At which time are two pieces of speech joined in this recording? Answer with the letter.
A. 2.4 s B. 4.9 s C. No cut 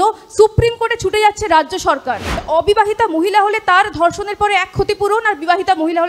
A